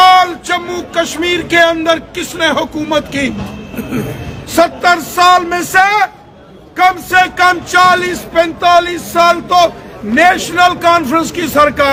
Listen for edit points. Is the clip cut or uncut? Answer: uncut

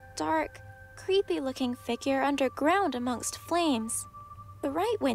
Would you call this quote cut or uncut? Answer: uncut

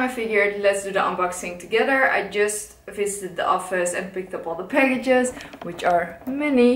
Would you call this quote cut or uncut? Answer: uncut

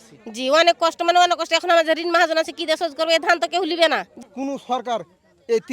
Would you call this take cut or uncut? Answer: cut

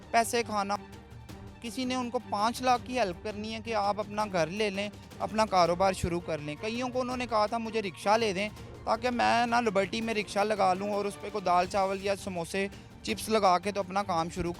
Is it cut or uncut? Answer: cut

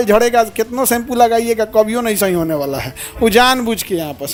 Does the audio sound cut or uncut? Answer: uncut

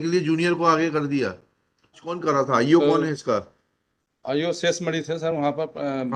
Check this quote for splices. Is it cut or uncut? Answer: cut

